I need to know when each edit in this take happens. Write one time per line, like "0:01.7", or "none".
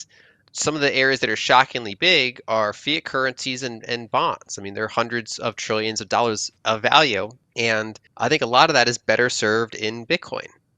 0:06.5
0:07.5